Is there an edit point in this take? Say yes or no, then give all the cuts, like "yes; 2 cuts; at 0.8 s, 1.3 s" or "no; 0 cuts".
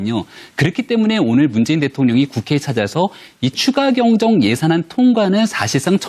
yes; 1 cut; at 2.3 s